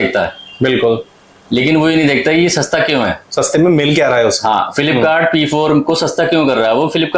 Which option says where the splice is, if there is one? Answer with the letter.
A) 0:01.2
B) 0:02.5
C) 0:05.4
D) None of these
D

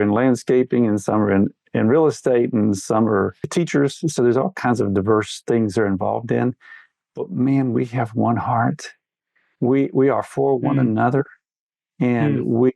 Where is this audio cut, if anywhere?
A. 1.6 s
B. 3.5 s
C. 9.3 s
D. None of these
B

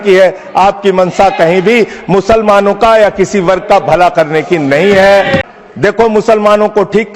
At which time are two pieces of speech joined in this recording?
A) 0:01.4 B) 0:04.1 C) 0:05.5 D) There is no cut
C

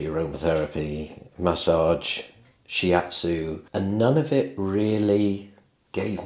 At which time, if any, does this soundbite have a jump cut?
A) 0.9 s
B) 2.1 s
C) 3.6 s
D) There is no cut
C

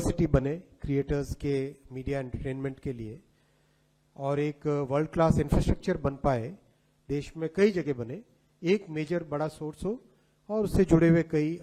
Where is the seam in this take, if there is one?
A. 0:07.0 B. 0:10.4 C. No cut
C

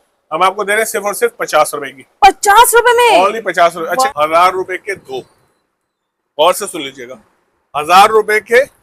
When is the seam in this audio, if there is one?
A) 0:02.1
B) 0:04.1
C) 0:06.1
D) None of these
B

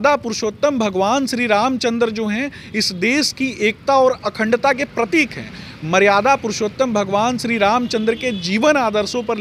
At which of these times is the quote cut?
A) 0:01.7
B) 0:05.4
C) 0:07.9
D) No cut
D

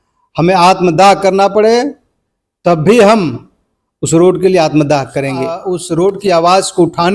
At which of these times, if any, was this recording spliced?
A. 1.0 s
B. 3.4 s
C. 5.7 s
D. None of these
C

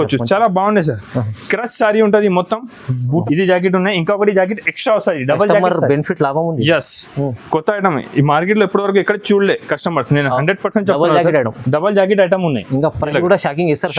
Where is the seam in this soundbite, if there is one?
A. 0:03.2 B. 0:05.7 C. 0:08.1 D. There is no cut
A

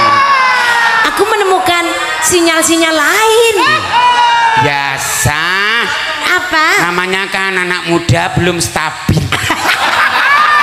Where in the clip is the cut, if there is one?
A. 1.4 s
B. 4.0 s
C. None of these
C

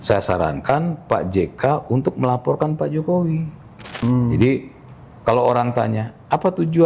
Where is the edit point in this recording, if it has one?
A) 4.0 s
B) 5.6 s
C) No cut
A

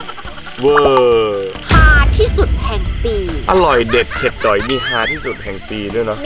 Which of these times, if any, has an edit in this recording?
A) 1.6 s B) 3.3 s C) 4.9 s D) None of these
A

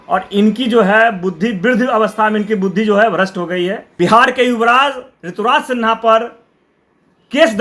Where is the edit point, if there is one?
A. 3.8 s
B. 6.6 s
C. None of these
A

